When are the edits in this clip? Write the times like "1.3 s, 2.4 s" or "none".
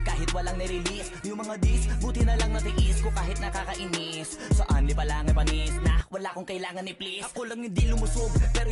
2.4 s

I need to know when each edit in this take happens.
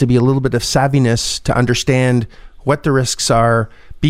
none

